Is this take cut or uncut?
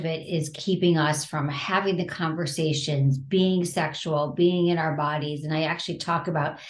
uncut